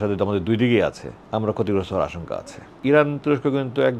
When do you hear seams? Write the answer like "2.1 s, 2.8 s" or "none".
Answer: 1.1 s, 2.8 s